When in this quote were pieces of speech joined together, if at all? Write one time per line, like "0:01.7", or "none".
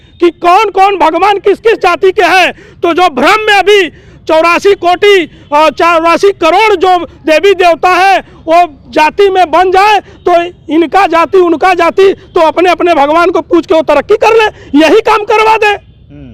none

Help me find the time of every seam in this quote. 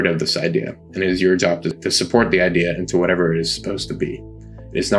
0:01.8

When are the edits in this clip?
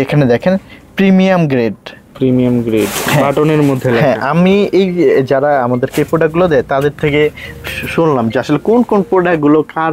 none

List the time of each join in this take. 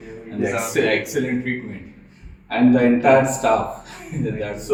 none

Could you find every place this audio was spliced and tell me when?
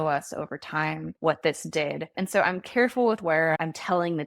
0:01.1
0:02.1
0:03.6

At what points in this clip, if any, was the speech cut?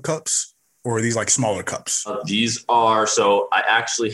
0:02.2

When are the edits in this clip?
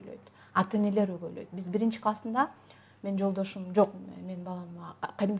none

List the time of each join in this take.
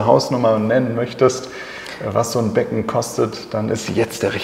none

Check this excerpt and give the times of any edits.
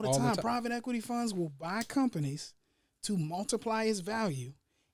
none

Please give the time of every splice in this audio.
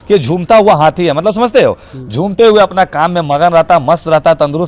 none

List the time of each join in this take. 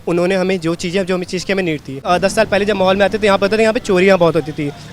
0:02.0

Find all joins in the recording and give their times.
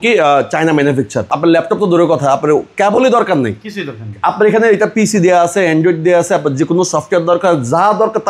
0:01.2

